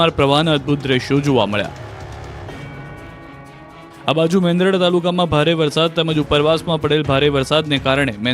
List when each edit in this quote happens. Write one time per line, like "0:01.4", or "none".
0:05.1